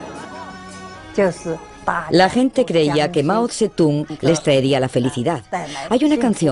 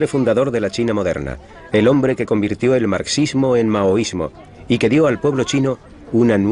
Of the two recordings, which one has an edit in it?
first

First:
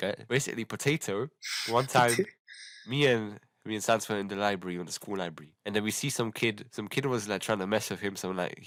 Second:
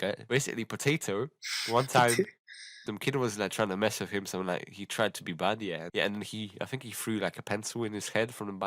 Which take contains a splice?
second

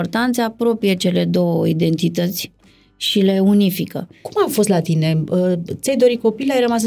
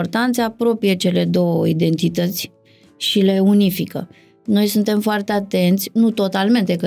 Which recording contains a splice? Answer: first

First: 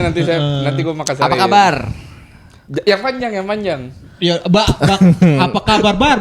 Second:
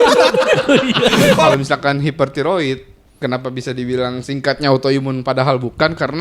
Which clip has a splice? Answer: second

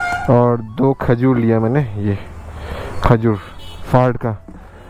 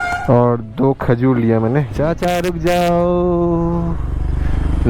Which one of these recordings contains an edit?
second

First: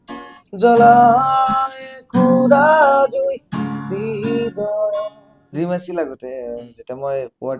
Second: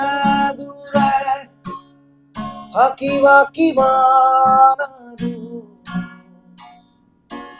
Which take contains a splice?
first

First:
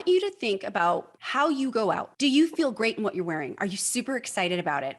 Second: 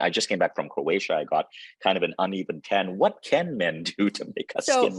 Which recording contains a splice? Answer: first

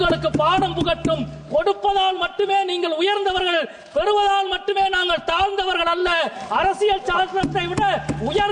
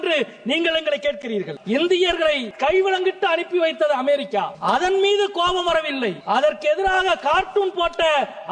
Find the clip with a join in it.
second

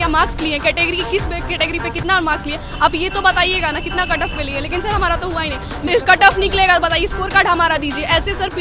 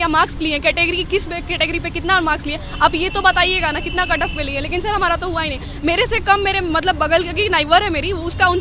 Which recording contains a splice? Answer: first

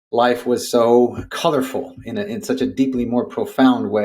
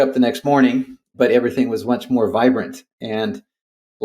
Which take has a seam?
first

